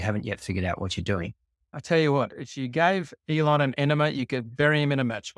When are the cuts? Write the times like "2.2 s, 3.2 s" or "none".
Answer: 1.6 s